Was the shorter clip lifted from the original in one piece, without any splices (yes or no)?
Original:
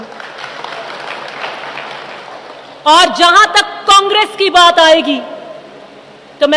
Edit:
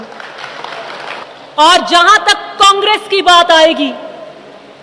no